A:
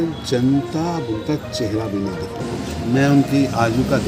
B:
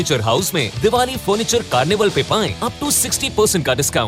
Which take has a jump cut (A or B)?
A